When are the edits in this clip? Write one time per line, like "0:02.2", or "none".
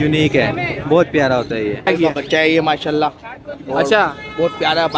0:01.9